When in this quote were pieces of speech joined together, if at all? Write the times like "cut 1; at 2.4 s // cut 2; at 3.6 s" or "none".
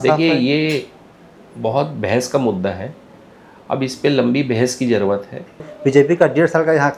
cut 1; at 5.7 s